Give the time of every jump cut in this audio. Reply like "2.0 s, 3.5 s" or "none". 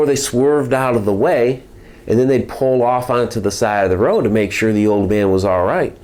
none